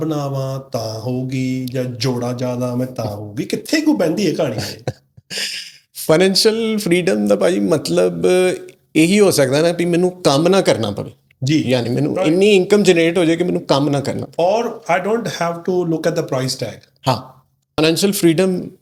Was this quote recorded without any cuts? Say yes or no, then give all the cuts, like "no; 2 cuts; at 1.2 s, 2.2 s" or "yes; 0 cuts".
yes; 0 cuts